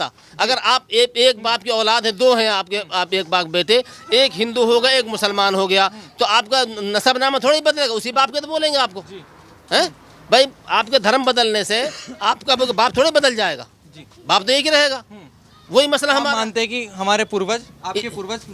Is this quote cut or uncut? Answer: uncut